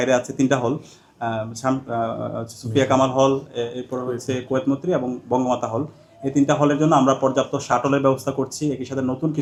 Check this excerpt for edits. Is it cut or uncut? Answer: uncut